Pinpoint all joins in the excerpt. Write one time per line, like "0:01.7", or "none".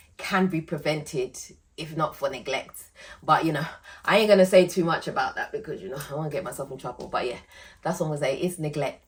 none

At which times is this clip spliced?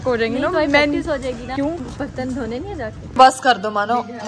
0:01.6
0:03.2

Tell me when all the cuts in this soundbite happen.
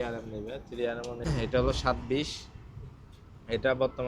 0:01.3

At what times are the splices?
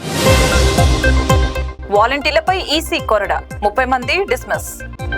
0:01.6

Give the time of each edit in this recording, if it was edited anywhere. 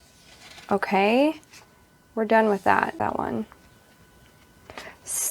0:03.0

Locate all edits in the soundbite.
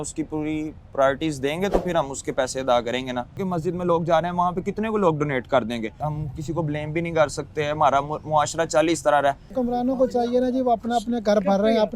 0:03.4
0:06.1
0:09.5

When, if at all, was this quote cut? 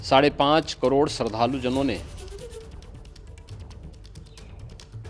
0:02.1

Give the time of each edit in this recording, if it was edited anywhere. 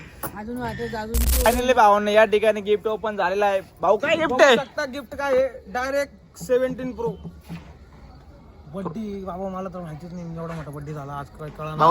0:01.4

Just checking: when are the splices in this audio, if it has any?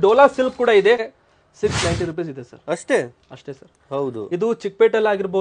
0:01.0

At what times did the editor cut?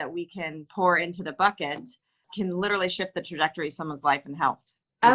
0:02.2

